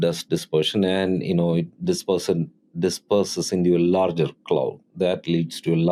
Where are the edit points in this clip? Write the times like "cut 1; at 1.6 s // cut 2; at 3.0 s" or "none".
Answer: none